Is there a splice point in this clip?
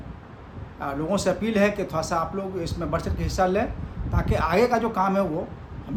no; 0 cuts

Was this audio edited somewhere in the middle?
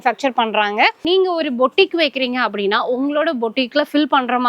yes; 1 cut; at 1.0 s

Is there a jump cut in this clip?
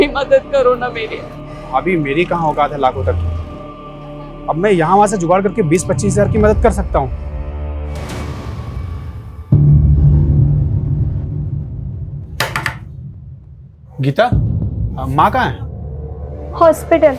yes; 1 cut; at 8.4 s

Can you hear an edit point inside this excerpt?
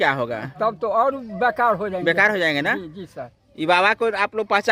no; 0 cuts

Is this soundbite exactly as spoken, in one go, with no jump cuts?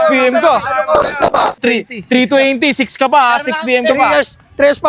no; 1 cut; at 1.6 s

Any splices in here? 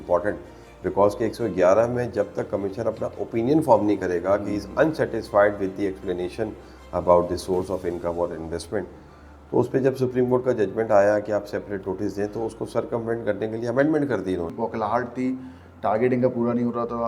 yes; 1 cut; at 14.5 s

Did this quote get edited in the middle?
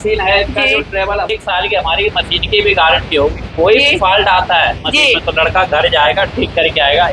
yes; 1 cut; at 1.4 s

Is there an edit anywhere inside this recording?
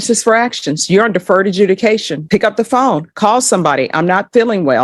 no; 0 cuts

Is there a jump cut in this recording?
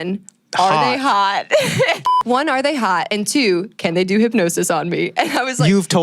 yes; 1 cut; at 2.2 s

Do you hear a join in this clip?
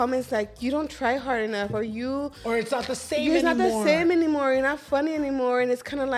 no; 0 cuts

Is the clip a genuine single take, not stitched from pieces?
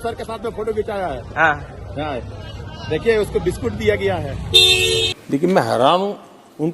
no; 1 cut; at 5.1 s

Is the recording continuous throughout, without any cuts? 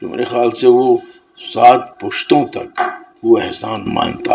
no; 1 cut; at 3.1 s

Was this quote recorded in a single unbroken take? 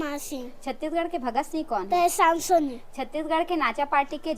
yes; 0 cuts

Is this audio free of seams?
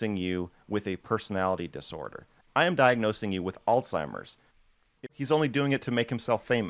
no; 1 cut; at 5.1 s

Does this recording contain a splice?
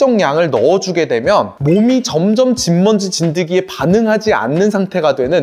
no; 0 cuts

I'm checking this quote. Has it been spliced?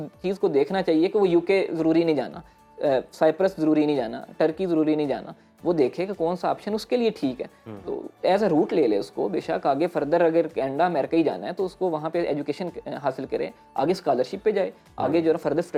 no; 0 cuts

